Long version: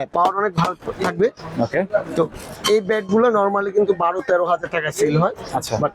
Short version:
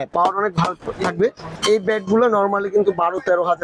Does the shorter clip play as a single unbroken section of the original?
no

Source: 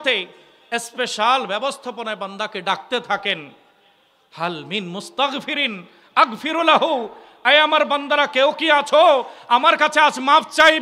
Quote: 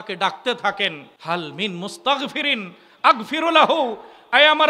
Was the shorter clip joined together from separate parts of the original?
yes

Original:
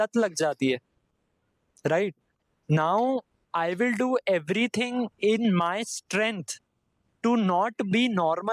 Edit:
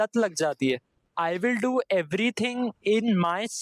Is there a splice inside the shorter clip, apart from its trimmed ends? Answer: yes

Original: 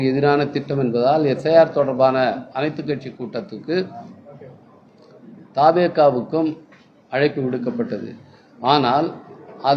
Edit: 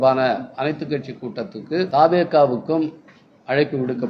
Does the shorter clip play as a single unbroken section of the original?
no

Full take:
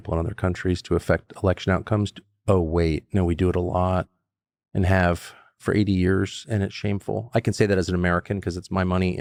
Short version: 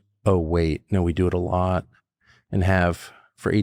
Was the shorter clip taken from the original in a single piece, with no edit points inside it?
yes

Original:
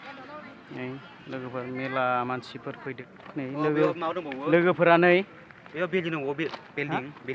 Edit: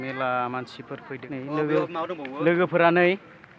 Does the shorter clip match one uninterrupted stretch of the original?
no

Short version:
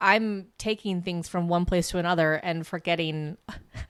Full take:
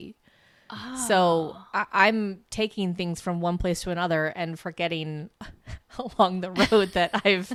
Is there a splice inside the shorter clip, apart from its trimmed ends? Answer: no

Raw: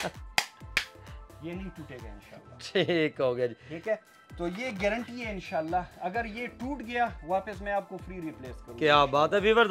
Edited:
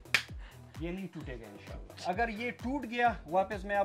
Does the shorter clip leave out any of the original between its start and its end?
yes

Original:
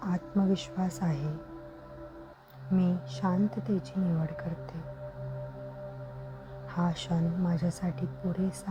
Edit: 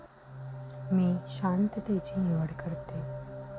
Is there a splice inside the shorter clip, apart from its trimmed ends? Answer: yes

